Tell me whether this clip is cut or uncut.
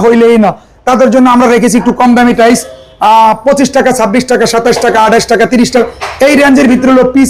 uncut